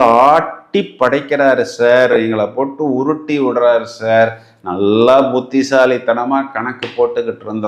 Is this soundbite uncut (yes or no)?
yes